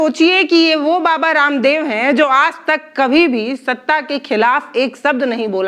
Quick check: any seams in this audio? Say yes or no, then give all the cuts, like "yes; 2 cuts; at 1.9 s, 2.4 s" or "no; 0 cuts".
no; 0 cuts